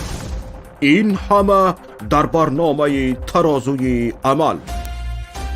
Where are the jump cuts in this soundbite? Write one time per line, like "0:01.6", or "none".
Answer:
0:04.6